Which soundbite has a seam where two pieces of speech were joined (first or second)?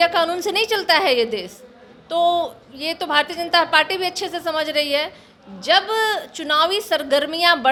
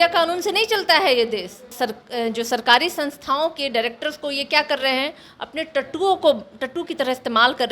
second